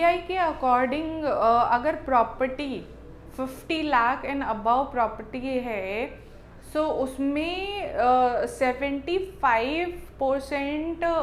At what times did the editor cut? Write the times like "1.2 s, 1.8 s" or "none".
none